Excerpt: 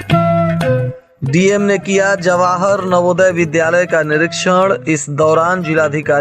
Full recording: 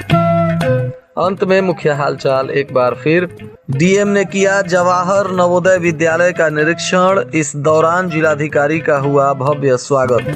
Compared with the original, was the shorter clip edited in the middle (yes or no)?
yes